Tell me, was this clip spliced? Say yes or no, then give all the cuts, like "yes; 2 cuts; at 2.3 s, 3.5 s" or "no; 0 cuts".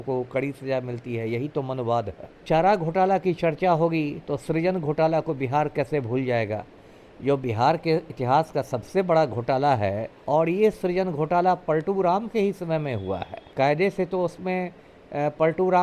yes; 3 cuts; at 2.4 s, 10.1 s, 13.4 s